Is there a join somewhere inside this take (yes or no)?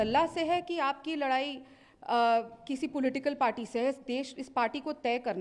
no